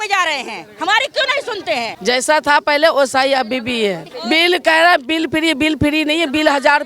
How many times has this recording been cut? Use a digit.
2